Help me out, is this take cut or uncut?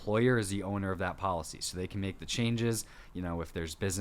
uncut